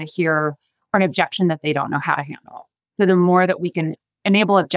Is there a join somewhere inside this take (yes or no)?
no